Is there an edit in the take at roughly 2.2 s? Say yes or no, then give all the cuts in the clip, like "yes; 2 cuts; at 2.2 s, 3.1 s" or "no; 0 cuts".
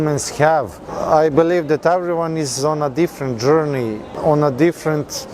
no; 2 cuts; at 0.9 s, 4.1 s